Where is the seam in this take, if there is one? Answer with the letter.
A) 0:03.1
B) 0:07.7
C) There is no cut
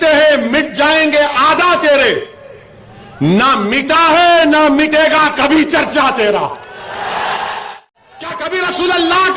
B